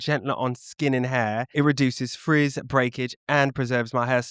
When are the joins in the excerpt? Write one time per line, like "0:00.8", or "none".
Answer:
0:01.5